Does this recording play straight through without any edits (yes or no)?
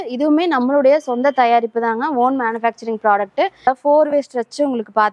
no